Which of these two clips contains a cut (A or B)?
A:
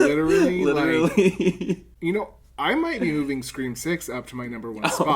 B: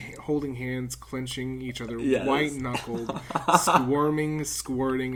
A